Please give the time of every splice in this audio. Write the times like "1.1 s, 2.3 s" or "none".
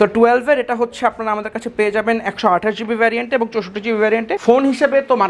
4.3 s

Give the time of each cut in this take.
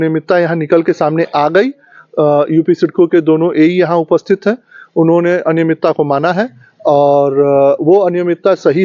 none

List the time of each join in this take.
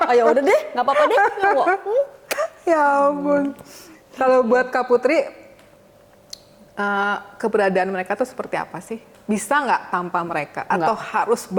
none

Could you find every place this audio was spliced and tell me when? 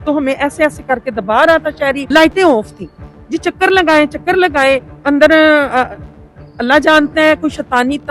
2.0 s, 4.9 s

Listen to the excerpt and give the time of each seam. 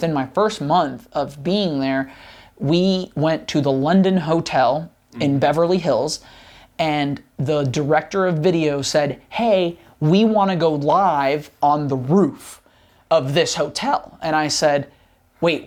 none

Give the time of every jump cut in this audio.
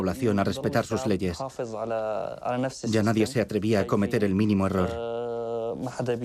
none

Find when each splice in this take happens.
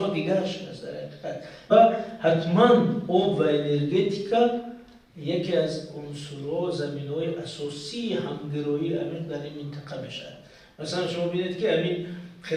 1.7 s

